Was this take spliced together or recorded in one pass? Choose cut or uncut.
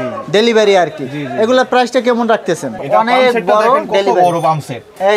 cut